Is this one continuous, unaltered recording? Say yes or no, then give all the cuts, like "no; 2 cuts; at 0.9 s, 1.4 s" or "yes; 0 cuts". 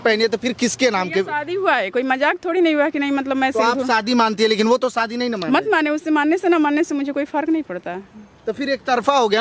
yes; 0 cuts